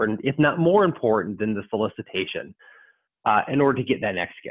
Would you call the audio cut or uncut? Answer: uncut